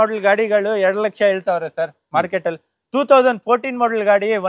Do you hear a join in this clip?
no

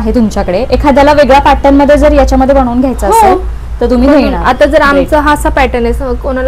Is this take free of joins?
yes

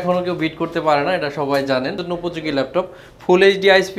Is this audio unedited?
no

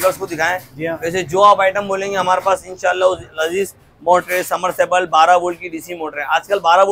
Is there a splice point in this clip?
no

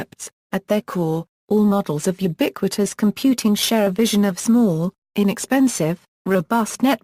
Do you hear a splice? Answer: no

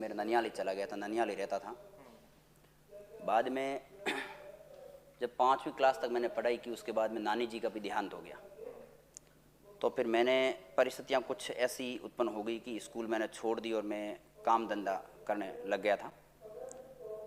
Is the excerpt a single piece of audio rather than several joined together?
yes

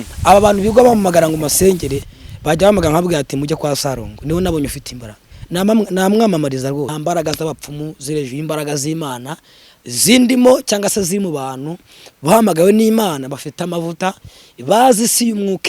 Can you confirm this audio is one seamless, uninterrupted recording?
no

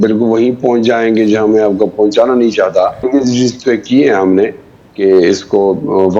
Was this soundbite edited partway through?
yes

